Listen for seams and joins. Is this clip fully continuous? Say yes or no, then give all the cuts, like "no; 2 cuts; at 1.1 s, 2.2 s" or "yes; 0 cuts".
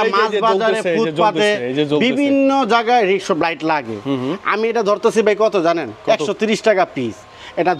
yes; 0 cuts